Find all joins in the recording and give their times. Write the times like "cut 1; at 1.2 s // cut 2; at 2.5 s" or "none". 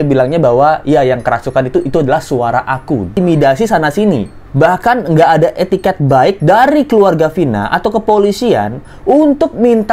cut 1; at 3.1 s